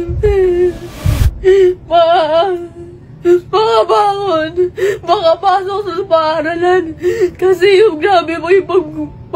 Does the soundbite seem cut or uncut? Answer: uncut